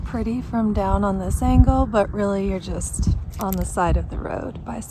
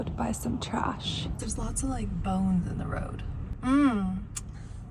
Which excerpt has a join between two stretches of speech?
second; 1 cut; at 1.4 s

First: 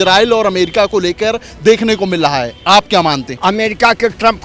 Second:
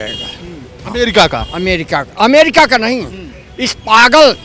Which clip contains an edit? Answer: first; 1 cut; at 3.4 s

